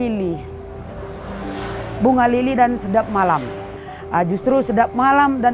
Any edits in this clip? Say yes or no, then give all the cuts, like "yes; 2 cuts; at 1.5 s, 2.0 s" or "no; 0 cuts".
yes; 1 cut; at 3.6 s